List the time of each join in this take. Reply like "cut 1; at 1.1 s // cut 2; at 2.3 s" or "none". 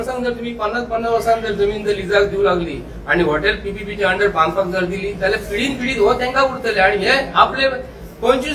none